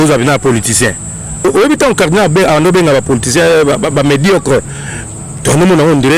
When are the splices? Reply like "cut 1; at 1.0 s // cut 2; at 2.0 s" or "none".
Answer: cut 1; at 1.4 s